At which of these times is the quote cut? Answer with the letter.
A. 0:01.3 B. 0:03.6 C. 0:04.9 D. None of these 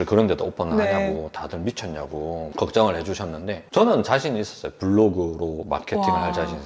D